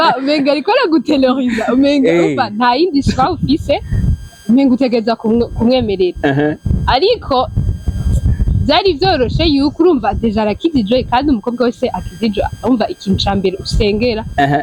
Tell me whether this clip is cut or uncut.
uncut